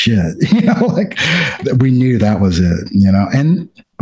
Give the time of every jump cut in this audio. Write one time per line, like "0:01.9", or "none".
none